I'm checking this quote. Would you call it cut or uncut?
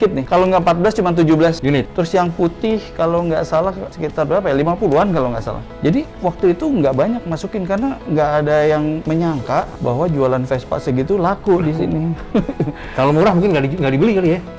uncut